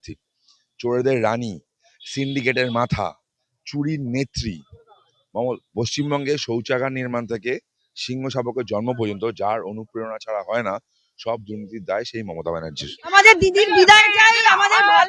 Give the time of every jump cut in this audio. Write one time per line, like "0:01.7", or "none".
0:13.1